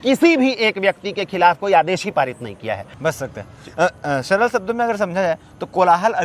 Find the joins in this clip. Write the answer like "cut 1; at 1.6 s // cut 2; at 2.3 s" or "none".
cut 1; at 2.8 s